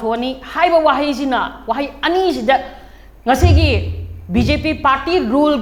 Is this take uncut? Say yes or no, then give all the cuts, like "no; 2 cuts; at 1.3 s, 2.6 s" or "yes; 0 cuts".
yes; 0 cuts